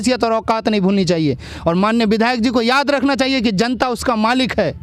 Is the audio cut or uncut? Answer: uncut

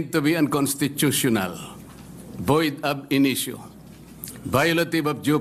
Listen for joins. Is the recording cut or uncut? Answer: uncut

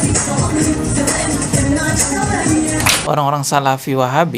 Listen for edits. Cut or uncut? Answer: cut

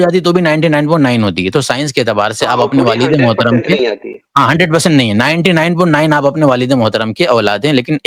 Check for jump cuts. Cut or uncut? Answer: uncut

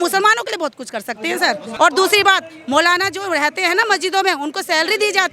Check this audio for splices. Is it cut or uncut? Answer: cut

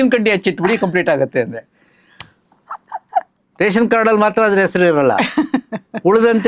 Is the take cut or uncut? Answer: cut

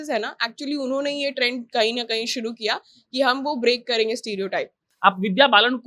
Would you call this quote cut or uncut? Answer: cut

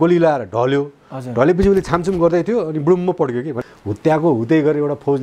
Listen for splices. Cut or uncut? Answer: cut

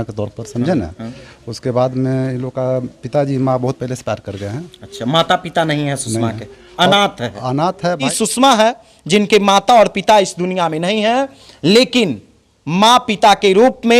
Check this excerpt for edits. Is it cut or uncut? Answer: cut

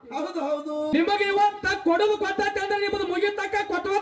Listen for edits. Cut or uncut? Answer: cut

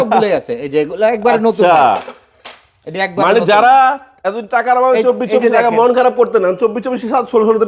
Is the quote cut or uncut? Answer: uncut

